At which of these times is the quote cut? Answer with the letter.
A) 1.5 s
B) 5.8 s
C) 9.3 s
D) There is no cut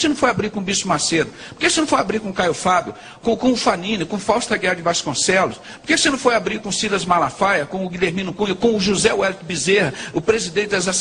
D